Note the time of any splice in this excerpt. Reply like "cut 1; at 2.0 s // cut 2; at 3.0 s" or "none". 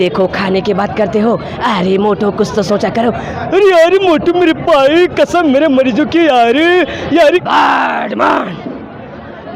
cut 1; at 7.4 s